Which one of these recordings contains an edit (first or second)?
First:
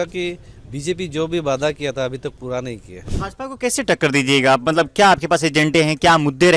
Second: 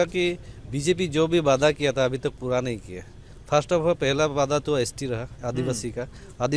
first